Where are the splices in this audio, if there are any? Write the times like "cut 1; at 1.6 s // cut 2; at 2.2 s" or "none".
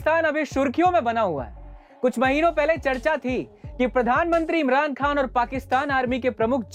none